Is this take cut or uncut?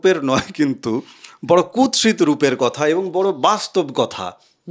uncut